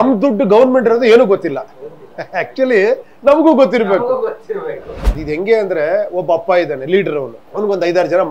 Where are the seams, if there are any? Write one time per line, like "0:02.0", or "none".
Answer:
0:05.1
0:07.4